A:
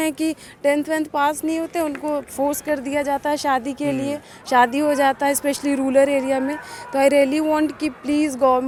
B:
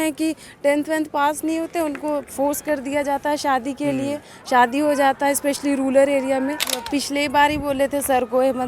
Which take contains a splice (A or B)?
B